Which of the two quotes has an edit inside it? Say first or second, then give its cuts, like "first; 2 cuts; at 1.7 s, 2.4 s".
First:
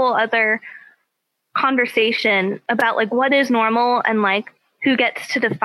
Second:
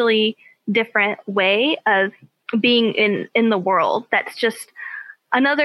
first; 1 cut; at 2.6 s